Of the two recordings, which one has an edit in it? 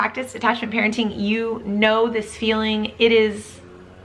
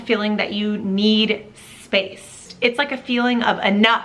second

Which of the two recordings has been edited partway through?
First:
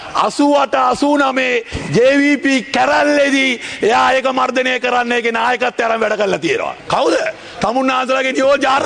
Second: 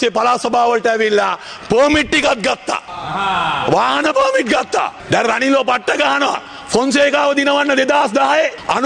second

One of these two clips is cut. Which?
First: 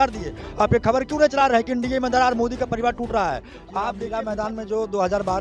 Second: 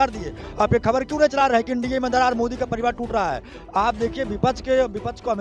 first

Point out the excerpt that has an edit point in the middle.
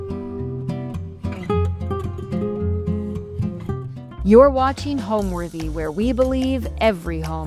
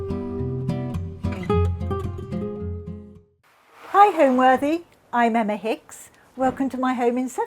second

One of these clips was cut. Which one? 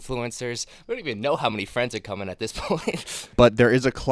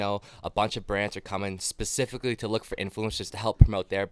first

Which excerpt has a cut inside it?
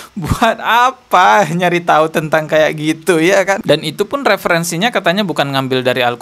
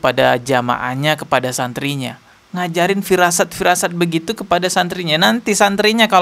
first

